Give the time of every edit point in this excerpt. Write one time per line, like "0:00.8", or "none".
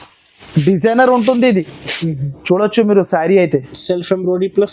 none